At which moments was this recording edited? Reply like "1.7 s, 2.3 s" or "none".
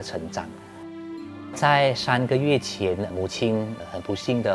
none